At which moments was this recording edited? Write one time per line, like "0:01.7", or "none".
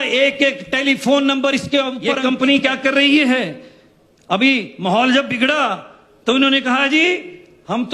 0:02.1